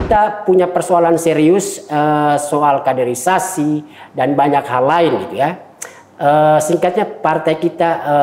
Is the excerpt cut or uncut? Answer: uncut